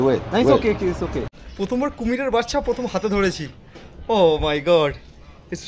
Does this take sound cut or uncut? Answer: cut